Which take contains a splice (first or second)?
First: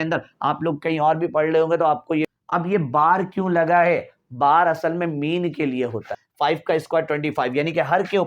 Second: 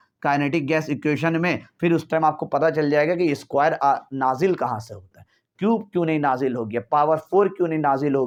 first